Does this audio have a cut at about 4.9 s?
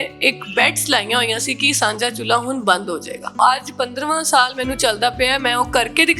no; 1 cut; at 3.4 s

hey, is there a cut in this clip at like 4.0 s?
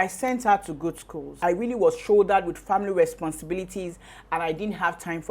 no; 1 cut; at 1.3 s

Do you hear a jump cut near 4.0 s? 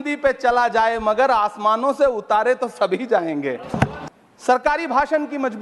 yes; 1 cut; at 4.0 s

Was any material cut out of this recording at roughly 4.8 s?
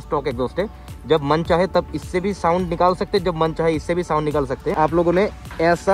yes; 1 cut; at 4.8 s

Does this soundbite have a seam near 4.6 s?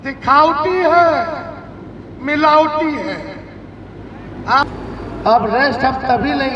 yes; 1 cut; at 4.6 s

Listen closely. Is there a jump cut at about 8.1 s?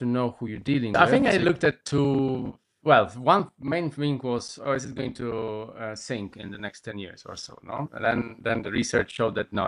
no; 1 cut; at 0.9 s

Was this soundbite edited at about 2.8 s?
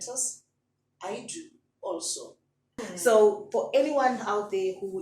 yes; 1 cut; at 2.8 s

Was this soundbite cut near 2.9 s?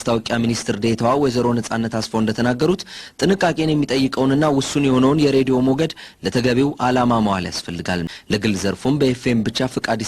no; 1 cut; at 8.1 s

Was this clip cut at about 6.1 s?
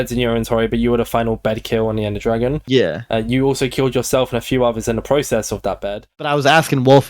yes; 1 cut; at 6.1 s

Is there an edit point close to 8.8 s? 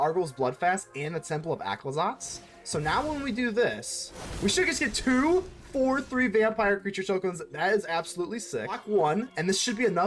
yes; 1 cut; at 8.8 s

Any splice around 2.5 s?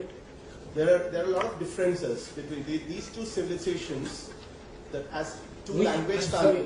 no; 1 cut; at 4.3 s

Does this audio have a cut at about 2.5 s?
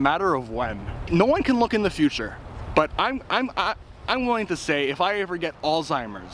no; 1 cut; at 1.1 s

